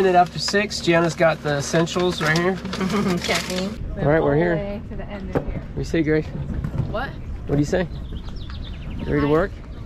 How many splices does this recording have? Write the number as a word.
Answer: one